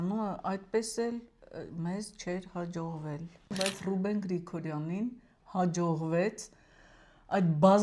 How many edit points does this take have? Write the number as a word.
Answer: one